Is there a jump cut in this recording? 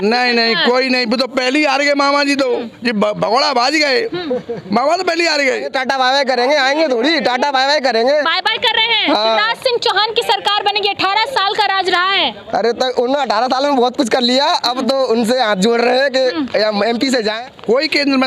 yes; 2 cuts; at 5.7 s, 17.3 s

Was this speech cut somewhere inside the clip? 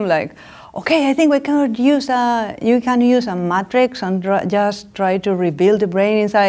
no; 0 cuts

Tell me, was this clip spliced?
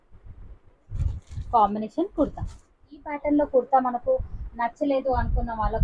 yes; 1 cut; at 3.1 s

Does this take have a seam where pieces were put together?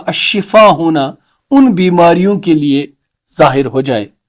no; 0 cuts

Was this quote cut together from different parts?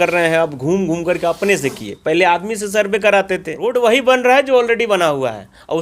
yes; 1 cut; at 3.6 s

